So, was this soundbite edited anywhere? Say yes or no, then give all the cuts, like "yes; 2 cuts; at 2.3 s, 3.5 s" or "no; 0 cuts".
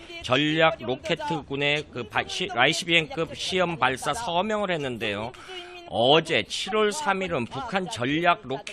yes; 1 cut; at 6.3 s